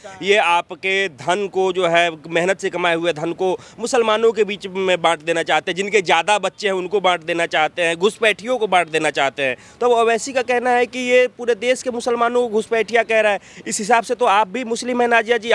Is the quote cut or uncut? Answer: uncut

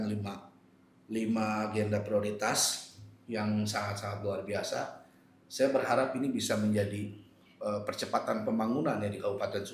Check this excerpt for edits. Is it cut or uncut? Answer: uncut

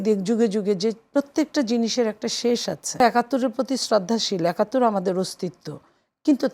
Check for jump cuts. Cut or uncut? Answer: cut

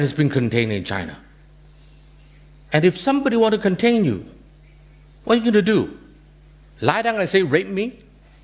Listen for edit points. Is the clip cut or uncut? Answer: uncut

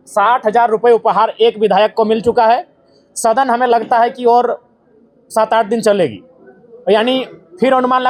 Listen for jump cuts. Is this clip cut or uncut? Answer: uncut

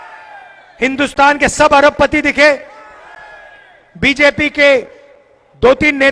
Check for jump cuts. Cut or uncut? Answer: uncut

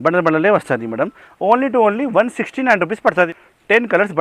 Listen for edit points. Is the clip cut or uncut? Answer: cut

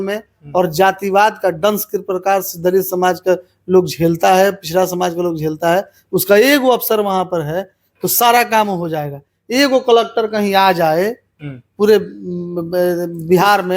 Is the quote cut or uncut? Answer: uncut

